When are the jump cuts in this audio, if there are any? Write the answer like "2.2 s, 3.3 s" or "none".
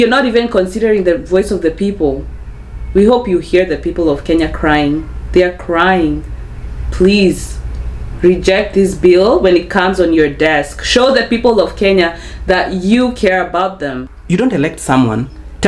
14.1 s

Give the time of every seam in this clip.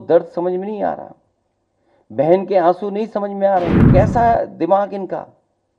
3.9 s

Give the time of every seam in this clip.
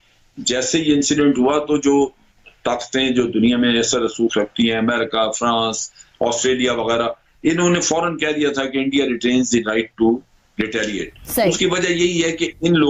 none

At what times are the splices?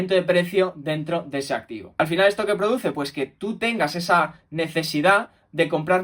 1.8 s

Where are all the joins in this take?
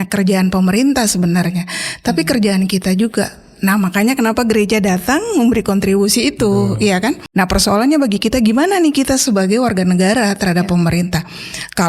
7.2 s

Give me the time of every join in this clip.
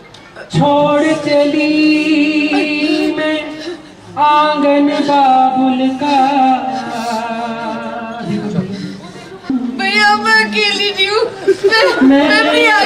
9.5 s

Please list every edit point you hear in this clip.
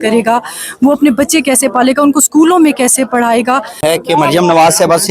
3.8 s

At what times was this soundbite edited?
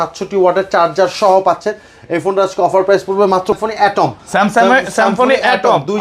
3.5 s

